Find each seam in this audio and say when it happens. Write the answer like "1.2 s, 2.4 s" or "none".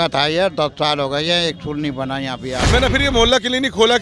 2.6 s